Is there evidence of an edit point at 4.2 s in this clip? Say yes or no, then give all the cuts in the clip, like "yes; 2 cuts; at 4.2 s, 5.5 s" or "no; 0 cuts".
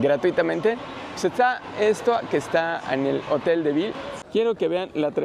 yes; 1 cut; at 4.2 s